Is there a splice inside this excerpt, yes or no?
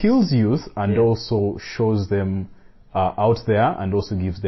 no